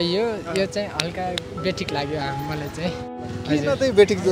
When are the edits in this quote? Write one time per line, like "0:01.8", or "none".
0:03.1